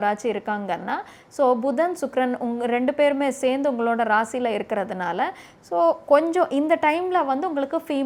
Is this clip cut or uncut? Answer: uncut